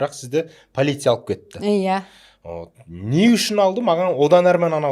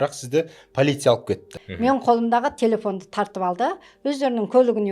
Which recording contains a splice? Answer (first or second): second